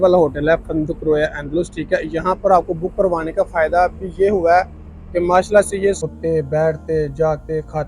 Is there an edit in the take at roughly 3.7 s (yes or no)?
no